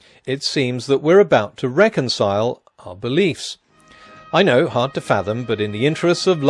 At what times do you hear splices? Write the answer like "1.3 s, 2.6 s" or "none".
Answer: 4.7 s

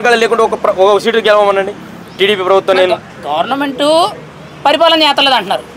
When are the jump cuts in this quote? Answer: none

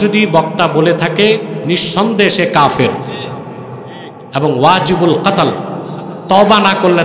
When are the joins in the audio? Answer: none

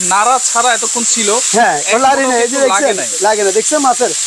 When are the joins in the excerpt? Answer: none

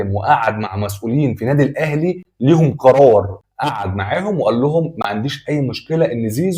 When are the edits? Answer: 3.4 s

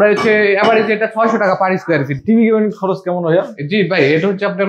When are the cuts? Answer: 2.2 s

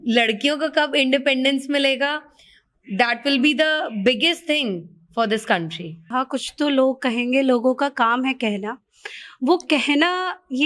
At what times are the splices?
6.1 s

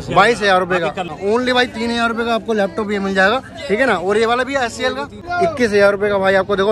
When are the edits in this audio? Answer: 1.1 s, 5.2 s

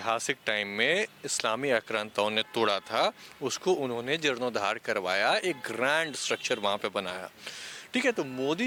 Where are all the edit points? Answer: none

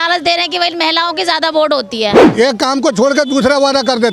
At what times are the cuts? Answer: 2.2 s

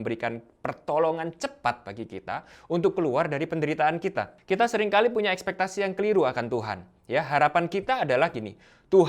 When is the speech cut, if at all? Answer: 4.4 s

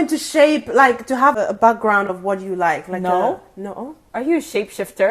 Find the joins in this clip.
1.4 s

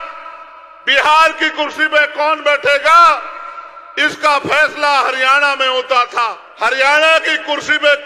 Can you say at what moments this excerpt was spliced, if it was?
6.4 s

